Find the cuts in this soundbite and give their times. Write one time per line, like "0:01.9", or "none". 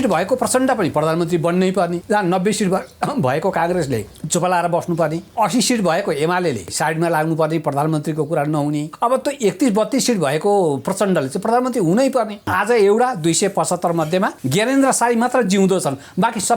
0:02.0
0:04.2
0:05.2
0:06.7
0:08.9
0:12.4
0:14.4